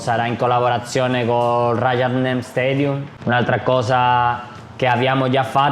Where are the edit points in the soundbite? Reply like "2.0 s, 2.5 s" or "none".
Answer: 3.1 s